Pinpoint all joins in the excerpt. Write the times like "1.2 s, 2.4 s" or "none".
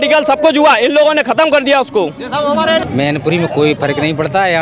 2.8 s